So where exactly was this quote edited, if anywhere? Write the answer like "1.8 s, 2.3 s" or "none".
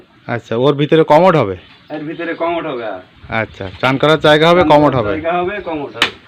none